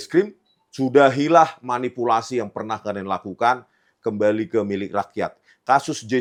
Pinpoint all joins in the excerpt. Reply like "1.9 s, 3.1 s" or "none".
none

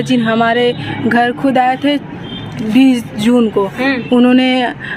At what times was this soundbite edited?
none

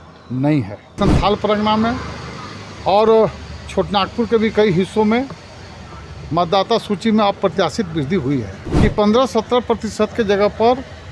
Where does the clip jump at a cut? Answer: 1.0 s, 8.6 s

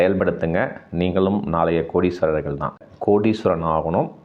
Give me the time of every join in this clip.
2.9 s

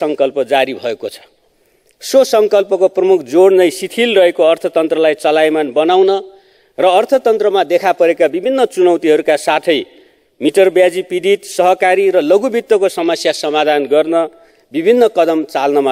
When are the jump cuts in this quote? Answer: none

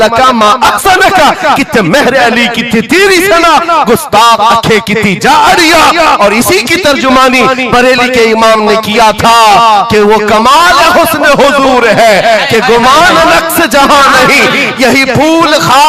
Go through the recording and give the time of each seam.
none

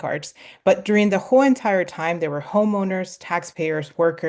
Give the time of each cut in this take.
none

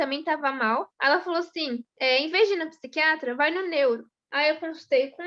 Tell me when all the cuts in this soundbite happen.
0.9 s, 1.9 s, 4.2 s

